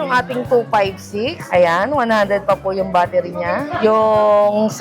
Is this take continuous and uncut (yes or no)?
no